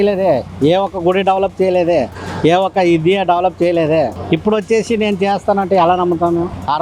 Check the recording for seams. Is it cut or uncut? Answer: uncut